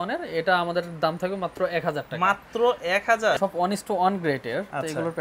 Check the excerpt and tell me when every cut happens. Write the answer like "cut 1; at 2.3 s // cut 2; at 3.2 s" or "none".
cut 1; at 3.4 s